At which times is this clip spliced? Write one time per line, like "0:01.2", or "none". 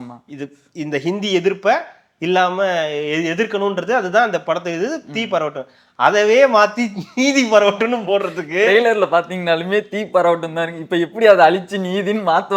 none